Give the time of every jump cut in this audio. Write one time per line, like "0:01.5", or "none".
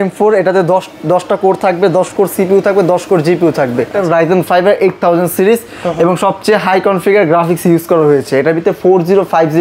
0:03.9